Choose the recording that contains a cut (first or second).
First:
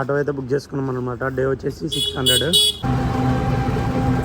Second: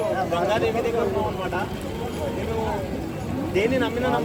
first